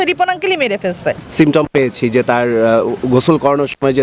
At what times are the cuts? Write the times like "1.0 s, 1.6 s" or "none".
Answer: 1.2 s